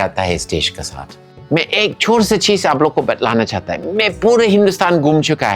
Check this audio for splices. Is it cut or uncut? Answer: cut